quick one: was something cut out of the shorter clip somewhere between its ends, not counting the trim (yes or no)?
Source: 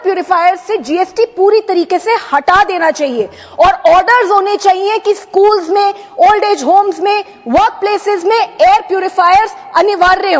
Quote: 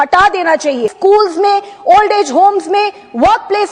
yes